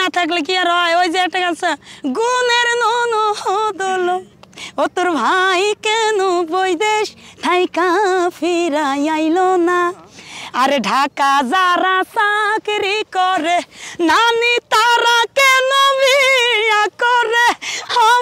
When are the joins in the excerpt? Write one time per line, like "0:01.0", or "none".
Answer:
none